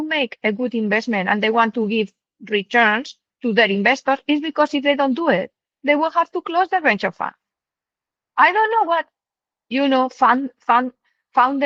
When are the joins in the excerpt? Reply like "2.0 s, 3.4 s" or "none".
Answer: none